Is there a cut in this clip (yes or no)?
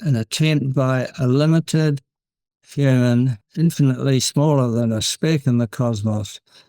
yes